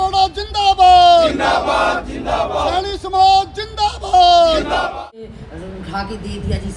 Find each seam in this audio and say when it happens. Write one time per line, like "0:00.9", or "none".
0:04.9

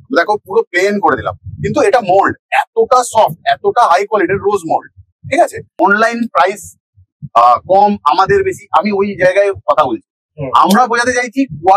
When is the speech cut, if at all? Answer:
0:05.6

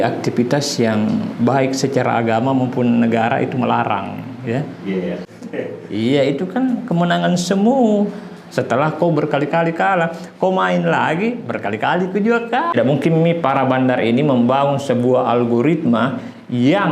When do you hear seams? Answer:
0:05.2
0:12.7

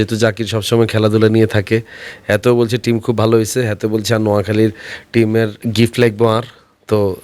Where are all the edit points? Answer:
0:05.6

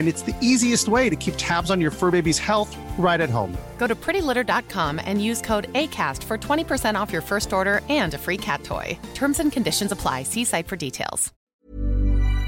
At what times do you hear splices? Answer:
0:11.3

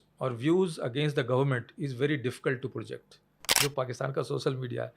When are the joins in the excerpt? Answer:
0:03.6

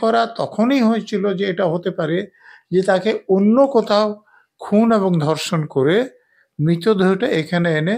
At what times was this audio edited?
none

